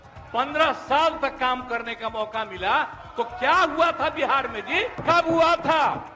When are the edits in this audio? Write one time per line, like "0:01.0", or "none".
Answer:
0:05.0